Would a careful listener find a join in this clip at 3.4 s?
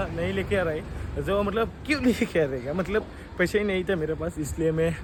no; 0 cuts

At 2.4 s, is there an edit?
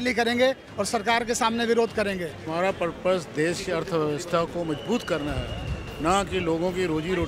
yes; 1 cut; at 2.4 s

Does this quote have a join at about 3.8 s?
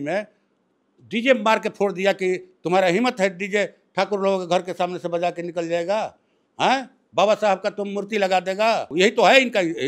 no; 1 cut; at 8.9 s

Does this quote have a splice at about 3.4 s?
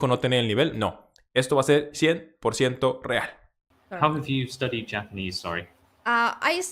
yes; 1 cut; at 3.4 s

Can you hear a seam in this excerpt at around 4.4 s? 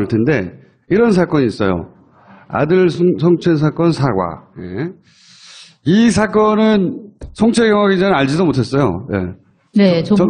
no; 0 cuts

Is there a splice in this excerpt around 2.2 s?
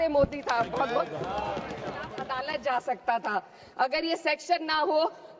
yes; 1 cut; at 2.2 s

